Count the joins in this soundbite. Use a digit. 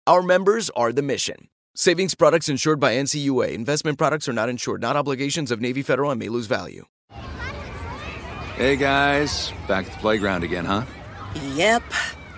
1